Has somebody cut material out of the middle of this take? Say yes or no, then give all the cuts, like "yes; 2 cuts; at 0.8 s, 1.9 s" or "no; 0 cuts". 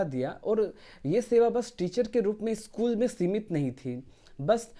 no; 0 cuts